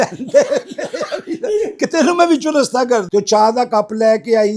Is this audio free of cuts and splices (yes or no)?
no